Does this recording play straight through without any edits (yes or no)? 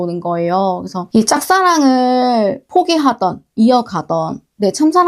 no